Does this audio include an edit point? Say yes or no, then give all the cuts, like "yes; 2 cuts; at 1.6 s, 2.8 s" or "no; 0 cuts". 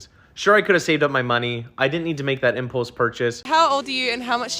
yes; 1 cut; at 3.4 s